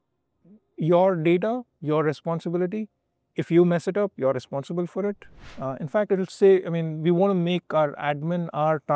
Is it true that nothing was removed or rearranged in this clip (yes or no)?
no